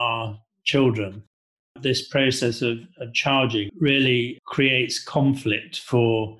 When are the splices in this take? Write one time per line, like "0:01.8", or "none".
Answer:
0:01.3
0:03.7